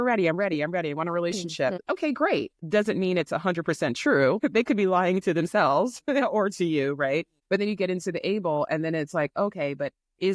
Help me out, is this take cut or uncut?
cut